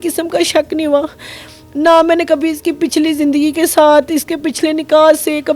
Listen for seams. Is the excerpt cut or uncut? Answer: uncut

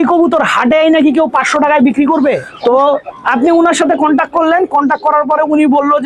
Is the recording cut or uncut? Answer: cut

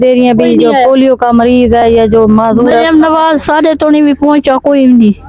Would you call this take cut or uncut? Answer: uncut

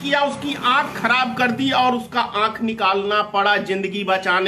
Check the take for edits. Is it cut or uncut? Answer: uncut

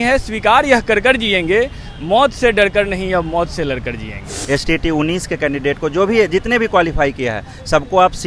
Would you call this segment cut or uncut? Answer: cut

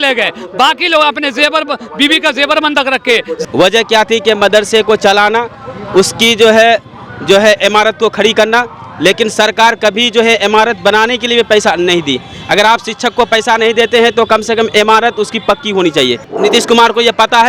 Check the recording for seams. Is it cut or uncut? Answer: cut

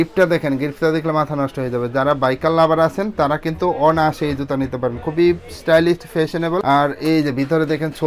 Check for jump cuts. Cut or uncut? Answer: uncut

